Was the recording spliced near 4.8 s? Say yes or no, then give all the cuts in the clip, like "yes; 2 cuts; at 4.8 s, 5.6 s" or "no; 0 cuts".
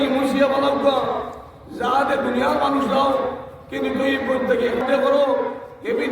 yes; 1 cut; at 4.8 s